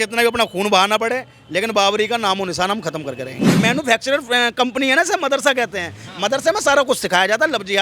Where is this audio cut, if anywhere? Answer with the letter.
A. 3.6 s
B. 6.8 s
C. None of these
A